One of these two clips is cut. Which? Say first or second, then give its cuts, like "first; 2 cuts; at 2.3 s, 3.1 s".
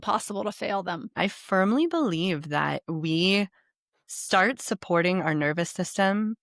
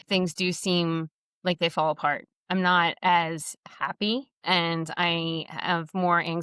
first; 1 cut; at 1.2 s